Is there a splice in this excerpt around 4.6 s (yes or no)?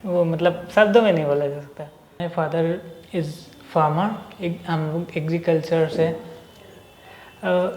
no